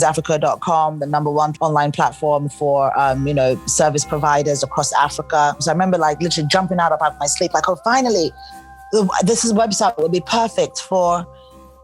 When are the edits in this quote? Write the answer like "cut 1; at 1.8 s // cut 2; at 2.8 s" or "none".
cut 1; at 1.5 s // cut 2; at 5.6 s